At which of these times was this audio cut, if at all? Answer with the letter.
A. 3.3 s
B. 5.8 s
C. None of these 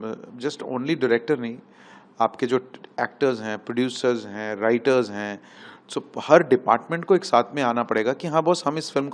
C